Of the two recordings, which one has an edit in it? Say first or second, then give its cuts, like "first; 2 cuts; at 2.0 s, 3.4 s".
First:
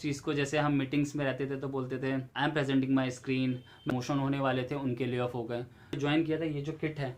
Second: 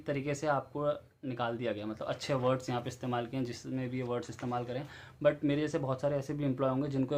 first; 3 cuts; at 2.3 s, 3.9 s, 6.0 s